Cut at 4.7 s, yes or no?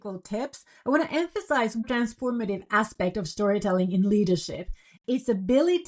no